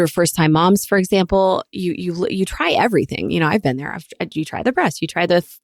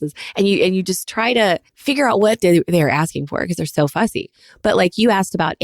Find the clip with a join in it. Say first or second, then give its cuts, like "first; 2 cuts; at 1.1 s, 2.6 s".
second; 2 cuts; at 1.7 s, 4.4 s